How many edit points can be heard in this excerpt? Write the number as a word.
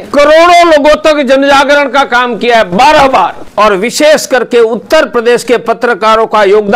one